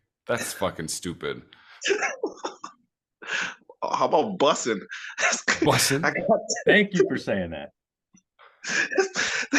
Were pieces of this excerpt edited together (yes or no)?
no